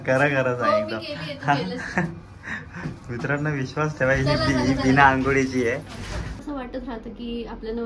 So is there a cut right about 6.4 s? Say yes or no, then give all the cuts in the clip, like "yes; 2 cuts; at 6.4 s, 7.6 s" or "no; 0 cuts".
yes; 1 cut; at 6.4 s